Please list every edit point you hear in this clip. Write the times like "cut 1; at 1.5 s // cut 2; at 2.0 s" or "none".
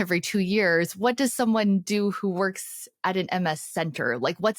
none